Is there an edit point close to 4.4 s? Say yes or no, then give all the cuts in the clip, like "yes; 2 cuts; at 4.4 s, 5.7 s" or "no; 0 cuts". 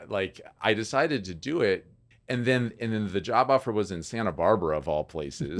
no; 1 cut; at 2.1 s